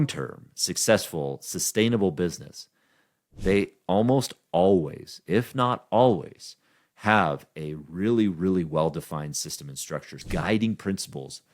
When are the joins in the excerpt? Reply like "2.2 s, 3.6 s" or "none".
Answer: 10.2 s

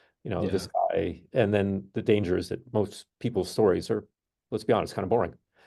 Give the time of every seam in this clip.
none

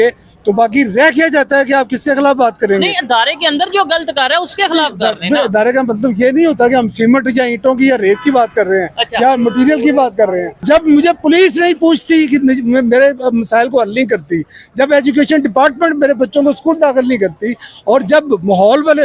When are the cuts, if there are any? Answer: 10.6 s

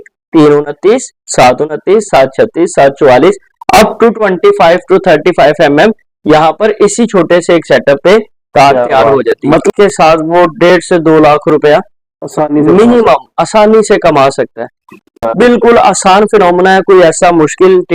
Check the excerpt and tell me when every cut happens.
9.7 s, 15.1 s

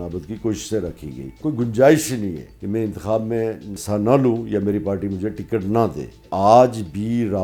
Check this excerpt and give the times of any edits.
1.4 s, 2.5 s, 3.7 s, 6.3 s

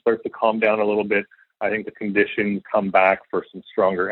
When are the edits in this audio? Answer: 2.6 s, 3.2 s

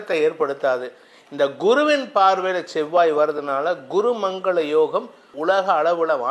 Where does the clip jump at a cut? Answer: 5.3 s

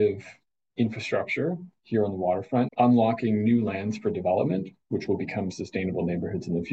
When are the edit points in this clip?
2.7 s

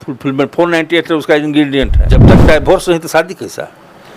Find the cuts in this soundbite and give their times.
2.3 s

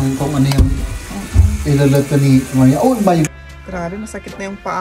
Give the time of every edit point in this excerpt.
3.3 s

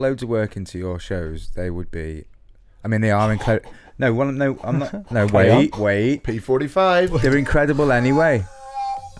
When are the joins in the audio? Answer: none

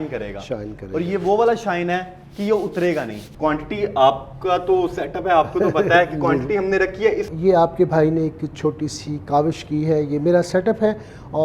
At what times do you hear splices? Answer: 3.2 s, 7.3 s

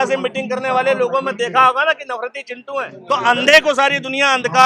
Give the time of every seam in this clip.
2.9 s

